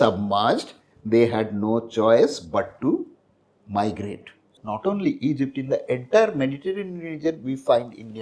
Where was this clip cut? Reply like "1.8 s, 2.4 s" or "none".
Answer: 4.6 s